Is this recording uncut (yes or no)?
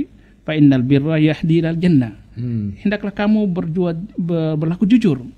yes